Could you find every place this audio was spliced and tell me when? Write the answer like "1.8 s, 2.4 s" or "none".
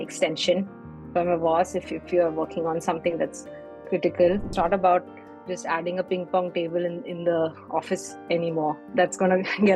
4.5 s

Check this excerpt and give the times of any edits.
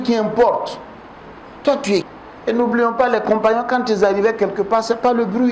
2.1 s

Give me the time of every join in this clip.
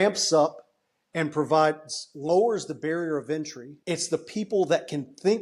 3.6 s

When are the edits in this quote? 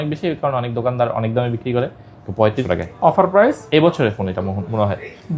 2.6 s

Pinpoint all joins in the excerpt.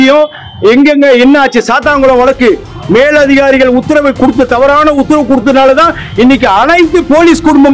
none

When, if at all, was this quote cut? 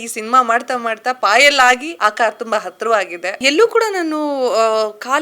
1.9 s, 3.4 s

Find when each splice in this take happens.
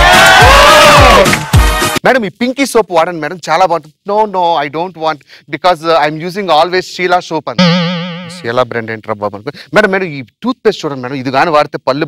1.5 s

